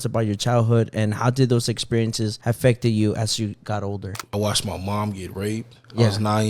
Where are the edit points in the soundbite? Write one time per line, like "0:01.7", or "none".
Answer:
0:04.1